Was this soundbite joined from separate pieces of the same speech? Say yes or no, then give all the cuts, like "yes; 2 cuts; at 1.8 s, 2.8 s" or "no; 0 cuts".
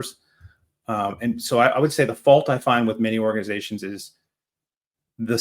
no; 0 cuts